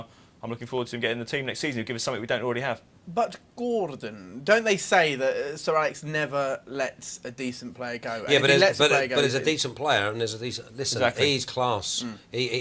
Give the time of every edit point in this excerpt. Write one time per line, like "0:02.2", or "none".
0:05.5